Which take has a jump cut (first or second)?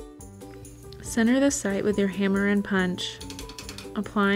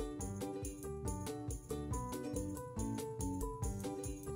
first